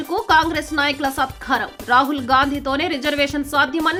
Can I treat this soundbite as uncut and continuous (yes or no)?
yes